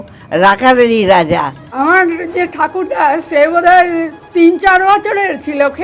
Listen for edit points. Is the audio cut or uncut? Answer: cut